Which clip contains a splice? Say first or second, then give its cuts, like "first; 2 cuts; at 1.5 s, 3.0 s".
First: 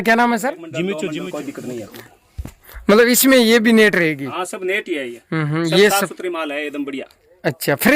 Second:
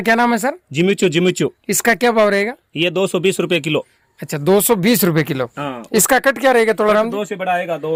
first; 1 cut; at 1.0 s